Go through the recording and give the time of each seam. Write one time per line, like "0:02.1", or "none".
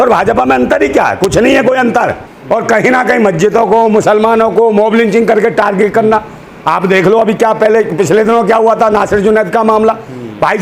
0:02.3